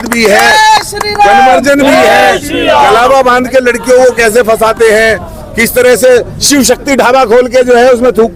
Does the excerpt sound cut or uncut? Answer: uncut